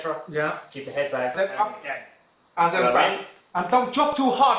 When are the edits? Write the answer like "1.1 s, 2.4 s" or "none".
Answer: 1.3 s